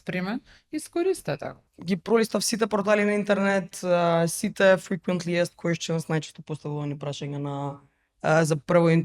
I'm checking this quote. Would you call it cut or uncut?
cut